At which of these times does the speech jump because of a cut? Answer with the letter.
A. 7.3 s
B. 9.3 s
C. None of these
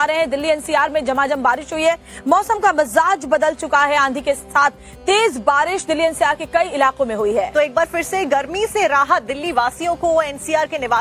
B